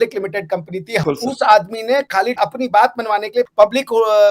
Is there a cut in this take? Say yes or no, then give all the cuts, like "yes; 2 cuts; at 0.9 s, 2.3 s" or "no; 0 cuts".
yes; 2 cuts; at 1.0 s, 3.4 s